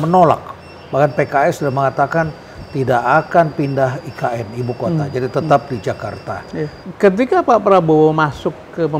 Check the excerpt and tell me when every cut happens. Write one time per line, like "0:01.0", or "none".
0:06.8